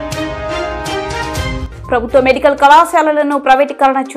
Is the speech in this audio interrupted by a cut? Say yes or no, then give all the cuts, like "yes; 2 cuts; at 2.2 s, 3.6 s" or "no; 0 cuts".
yes; 1 cut; at 1.7 s